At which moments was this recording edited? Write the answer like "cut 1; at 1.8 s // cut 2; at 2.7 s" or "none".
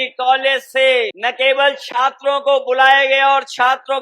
cut 1; at 1.2 s